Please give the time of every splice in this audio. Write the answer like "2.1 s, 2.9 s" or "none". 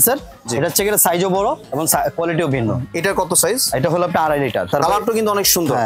4.7 s